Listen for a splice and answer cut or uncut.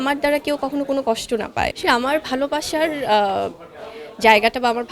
cut